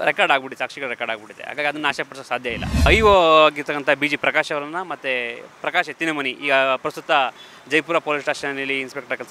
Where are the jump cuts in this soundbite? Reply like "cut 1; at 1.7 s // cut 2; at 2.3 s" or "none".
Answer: cut 1; at 2.9 s